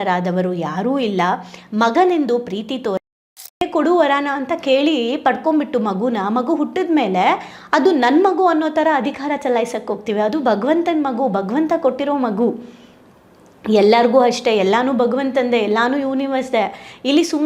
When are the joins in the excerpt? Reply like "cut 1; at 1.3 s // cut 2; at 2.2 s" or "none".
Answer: cut 1; at 3.6 s